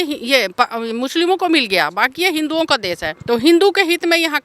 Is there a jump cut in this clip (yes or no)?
yes